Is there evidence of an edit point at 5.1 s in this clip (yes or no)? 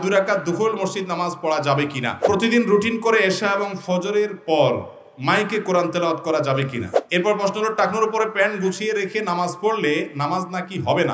no